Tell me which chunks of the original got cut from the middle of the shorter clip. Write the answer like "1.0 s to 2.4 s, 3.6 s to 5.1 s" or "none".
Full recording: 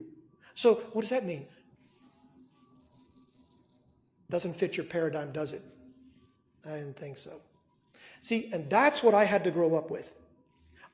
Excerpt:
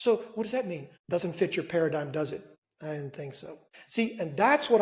1.5 s to 4.1 s, 5.8 s to 6.4 s, 7.6 s to 8.1 s